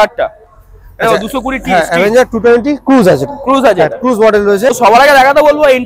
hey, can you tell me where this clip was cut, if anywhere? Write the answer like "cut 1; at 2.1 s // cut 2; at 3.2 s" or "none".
cut 1; at 4.7 s